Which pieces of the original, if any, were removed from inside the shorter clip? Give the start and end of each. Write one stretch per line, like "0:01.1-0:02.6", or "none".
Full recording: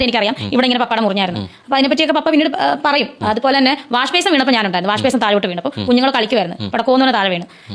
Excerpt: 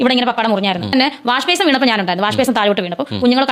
0:01.5-0:03.6